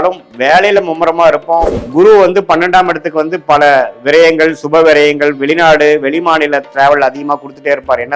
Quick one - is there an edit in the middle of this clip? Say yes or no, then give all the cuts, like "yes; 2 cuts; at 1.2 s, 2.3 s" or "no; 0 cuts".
yes; 1 cut; at 1.8 s